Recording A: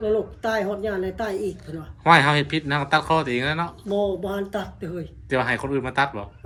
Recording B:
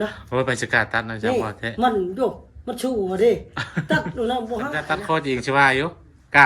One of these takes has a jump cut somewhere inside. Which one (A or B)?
B